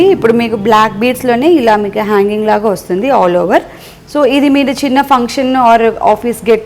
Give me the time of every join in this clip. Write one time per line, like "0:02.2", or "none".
none